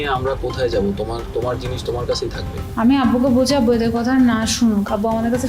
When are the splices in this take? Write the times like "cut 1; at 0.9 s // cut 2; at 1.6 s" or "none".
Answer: cut 1; at 2.6 s